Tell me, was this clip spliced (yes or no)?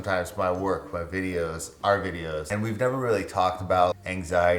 yes